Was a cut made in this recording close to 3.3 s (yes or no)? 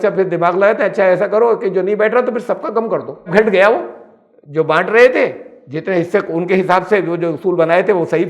yes